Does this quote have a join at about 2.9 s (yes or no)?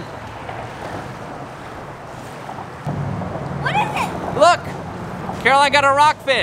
yes